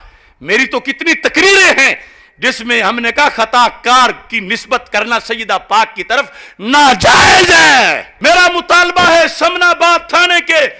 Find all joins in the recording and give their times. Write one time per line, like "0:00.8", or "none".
0:08.1